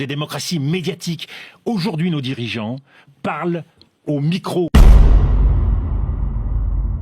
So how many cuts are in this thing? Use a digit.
1